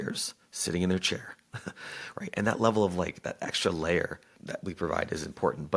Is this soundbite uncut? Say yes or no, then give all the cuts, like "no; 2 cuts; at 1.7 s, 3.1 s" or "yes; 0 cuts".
no; 1 cut; at 4.4 s